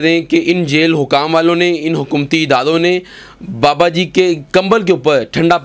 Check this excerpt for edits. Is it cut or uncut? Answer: uncut